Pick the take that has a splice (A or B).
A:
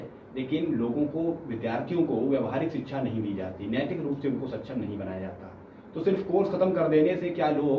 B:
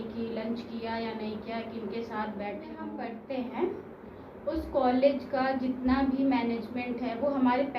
B